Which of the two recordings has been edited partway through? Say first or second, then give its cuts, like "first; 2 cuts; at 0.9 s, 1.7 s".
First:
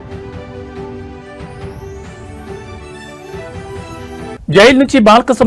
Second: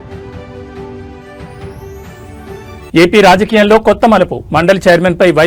first; 2 cuts; at 2.9 s, 3.8 s